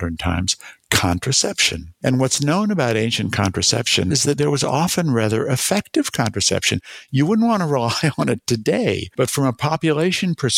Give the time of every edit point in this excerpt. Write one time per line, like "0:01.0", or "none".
none